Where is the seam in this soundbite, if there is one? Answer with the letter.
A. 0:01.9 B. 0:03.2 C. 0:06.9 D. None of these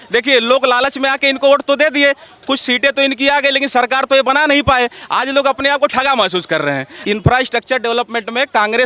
C